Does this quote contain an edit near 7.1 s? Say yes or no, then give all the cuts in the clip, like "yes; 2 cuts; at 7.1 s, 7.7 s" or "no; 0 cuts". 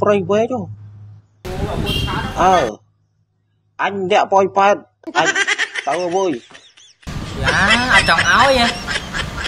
yes; 1 cut; at 7.1 s